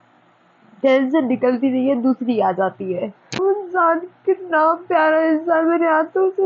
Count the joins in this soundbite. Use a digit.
1